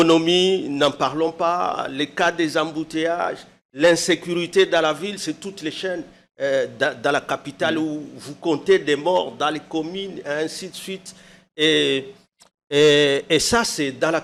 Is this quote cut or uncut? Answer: uncut